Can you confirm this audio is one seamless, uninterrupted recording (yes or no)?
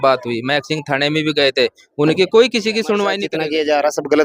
no